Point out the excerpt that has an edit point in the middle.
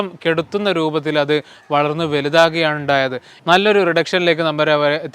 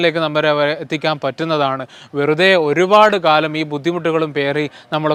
first; 1 cut; at 3.3 s

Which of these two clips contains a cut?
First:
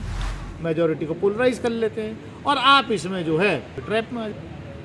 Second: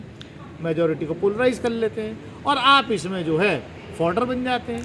first; 1 cut; at 3.9 s

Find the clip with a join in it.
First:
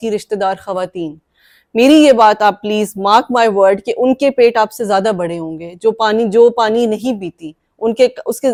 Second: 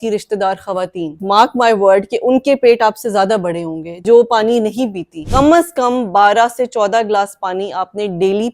second; 3 cuts; at 1.2 s, 4.0 s, 5.2 s

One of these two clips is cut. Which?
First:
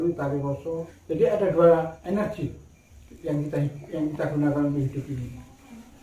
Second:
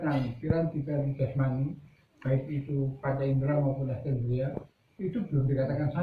first; 2 cuts; at 0.9 s, 2.0 s

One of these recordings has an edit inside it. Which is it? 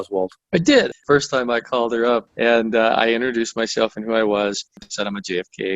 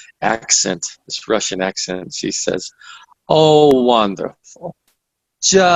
first; 3 cuts; at 1.0 s, 2.3 s, 4.8 s

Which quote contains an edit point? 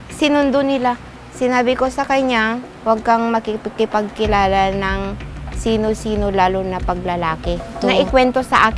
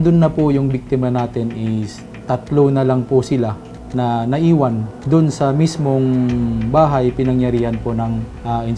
first; 2 cuts; at 2.7 s, 7.7 s

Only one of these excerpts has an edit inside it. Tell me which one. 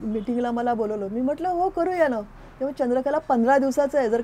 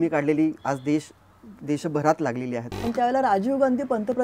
second; 1 cut; at 2.7 s

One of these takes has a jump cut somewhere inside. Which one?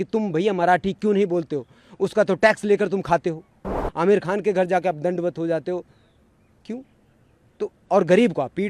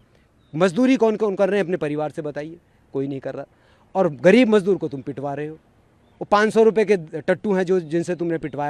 first; 1 cut; at 3.8 s

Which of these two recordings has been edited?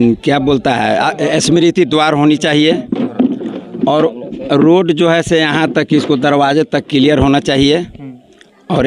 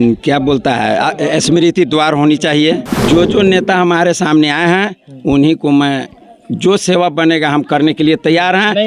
second; 1 cut; at 2.9 s

